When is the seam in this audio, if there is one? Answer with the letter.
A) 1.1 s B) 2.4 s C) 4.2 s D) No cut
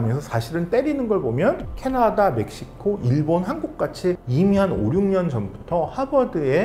C